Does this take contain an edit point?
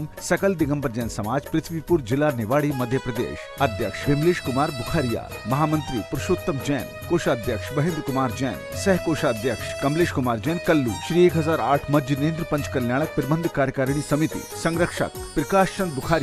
no; 0 cuts

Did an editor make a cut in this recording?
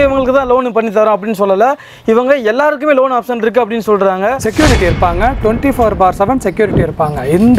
yes; 1 cut; at 4.5 s

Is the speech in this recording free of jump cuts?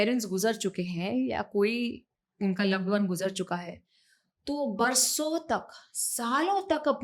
yes; 0 cuts

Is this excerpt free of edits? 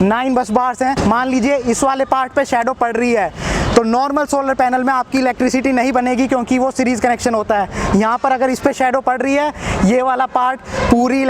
no; 1 cut; at 1.0 s

